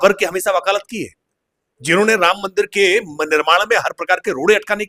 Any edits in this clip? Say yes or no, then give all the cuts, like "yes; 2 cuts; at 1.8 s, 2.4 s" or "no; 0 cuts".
no; 0 cuts